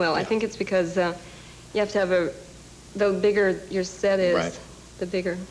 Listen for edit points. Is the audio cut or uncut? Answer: uncut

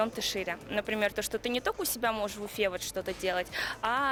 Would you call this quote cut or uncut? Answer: uncut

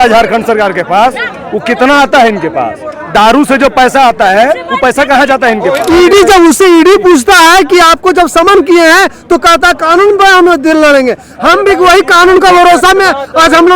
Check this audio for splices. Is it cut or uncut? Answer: cut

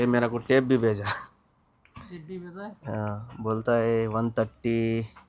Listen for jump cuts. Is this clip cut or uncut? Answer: uncut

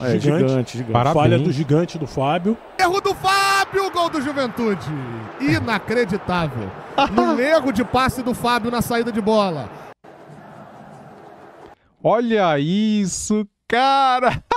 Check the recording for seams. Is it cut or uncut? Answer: cut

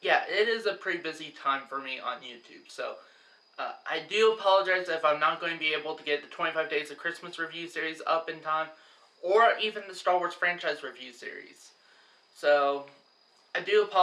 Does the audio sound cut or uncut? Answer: uncut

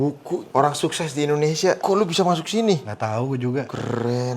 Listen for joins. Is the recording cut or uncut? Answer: cut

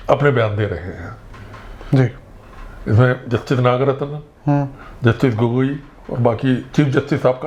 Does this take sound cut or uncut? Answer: uncut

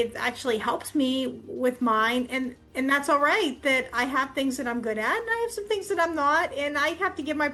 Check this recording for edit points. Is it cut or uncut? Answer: uncut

